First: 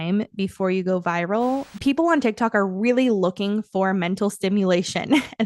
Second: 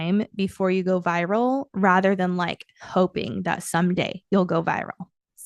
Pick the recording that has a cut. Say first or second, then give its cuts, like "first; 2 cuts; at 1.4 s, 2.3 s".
first; 1 cut; at 1.7 s